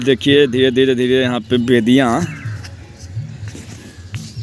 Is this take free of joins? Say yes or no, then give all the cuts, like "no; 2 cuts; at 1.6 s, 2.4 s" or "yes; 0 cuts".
yes; 0 cuts